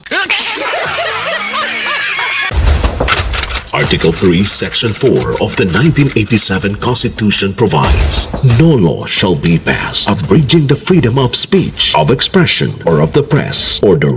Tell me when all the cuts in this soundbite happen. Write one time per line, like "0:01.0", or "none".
0:02.5